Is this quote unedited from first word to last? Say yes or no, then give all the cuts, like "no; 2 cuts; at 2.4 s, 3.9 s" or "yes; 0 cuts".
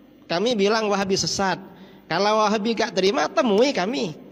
yes; 0 cuts